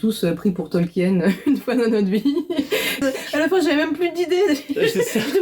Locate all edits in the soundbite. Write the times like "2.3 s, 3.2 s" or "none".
3.0 s